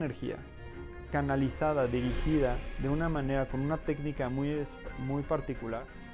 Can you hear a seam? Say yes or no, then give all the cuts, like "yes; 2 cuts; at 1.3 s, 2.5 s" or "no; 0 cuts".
no; 0 cuts